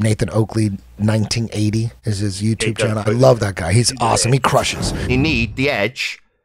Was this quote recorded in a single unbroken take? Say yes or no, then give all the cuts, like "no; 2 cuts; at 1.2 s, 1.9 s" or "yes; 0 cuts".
no; 1 cut; at 4.7 s